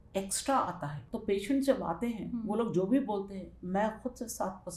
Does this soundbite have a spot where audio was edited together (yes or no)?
yes